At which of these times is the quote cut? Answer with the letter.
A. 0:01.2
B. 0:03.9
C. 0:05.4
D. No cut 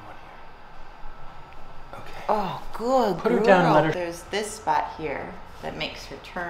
B